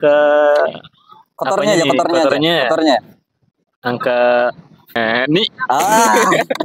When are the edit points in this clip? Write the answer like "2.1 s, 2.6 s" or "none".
5.0 s